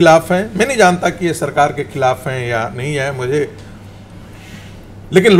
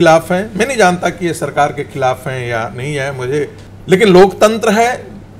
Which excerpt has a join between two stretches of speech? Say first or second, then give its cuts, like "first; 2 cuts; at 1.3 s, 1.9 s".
second; 1 cut; at 3.7 s